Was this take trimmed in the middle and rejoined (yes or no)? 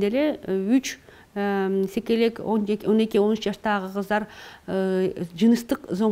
no